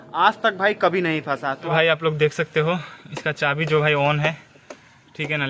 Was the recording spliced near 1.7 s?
yes; 1 cut; at 1.7 s

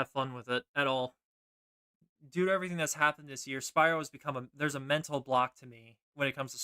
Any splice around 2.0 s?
yes; 1 cut; at 2.0 s

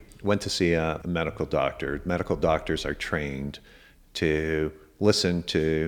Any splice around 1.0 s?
yes; 1 cut; at 1.0 s

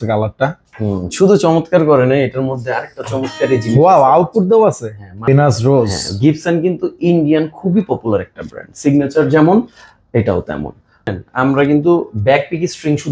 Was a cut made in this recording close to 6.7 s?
no; 2 cuts; at 5.3 s, 11.1 s

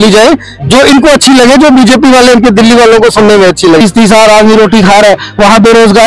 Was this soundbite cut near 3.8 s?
yes; 1 cut; at 3.8 s

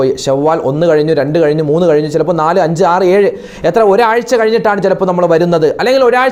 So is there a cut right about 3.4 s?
no; 0 cuts

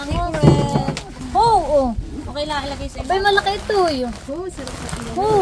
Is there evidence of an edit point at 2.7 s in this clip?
no; 1 cut; at 1.1 s

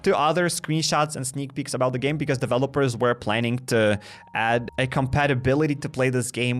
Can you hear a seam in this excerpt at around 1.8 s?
no; 0 cuts

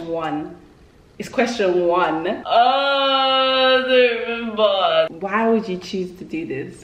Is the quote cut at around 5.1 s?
yes; 2 cuts; at 2.4 s, 5.1 s

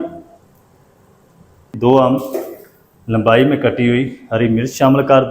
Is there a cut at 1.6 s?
yes; 1 cut; at 1.6 s

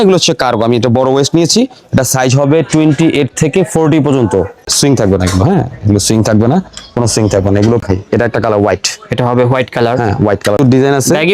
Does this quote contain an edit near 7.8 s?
yes; 3 cuts; at 4.7 s, 7.8 s, 10.6 s

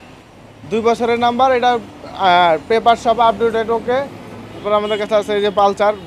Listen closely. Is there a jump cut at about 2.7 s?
no; 1 cut; at 4.6 s

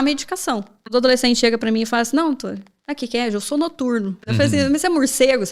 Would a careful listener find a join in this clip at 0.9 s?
yes; 2 cuts; at 0.9 s, 4.3 s

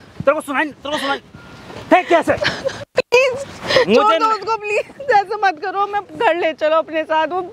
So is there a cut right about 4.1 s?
no; 1 cut; at 1.5 s

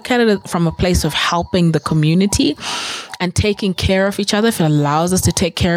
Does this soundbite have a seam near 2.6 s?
no; 0 cuts

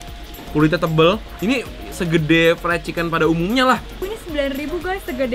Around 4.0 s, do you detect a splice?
yes; 1 cut; at 4.0 s

